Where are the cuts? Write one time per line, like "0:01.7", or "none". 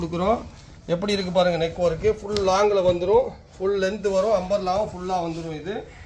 none